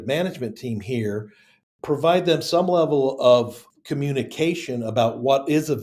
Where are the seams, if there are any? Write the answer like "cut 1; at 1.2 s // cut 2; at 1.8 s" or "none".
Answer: cut 1; at 3.6 s